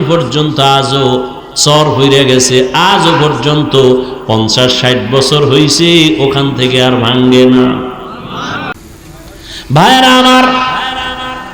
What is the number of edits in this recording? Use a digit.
1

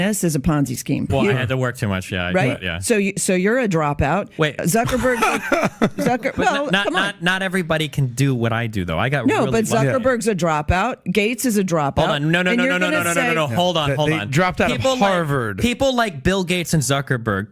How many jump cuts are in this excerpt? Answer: 1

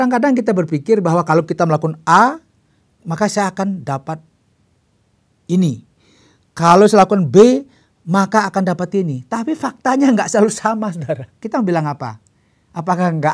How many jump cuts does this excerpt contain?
1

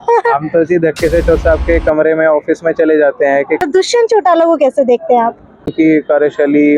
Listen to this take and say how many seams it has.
2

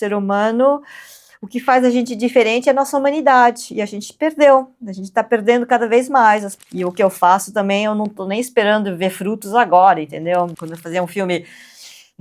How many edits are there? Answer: 2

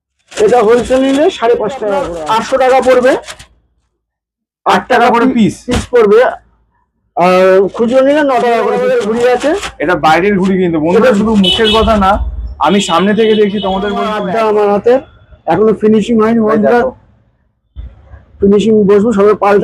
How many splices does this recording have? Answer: 3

